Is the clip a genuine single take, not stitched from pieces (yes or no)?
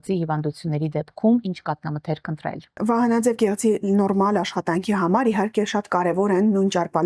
no